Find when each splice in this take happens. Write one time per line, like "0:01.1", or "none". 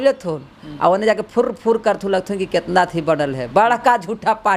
none